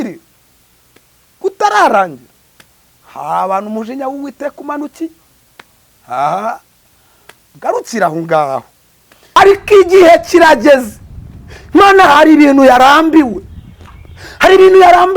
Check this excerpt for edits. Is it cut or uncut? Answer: cut